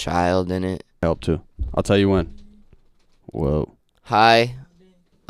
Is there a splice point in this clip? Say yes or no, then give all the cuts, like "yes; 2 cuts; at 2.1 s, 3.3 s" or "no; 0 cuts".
yes; 1 cut; at 1.0 s